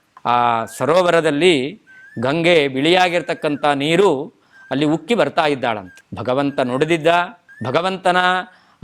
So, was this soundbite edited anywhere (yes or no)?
no